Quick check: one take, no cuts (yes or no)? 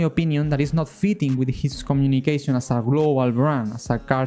yes